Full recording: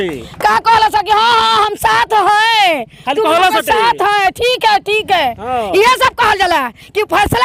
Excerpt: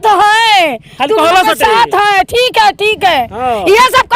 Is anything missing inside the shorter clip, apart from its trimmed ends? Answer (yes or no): no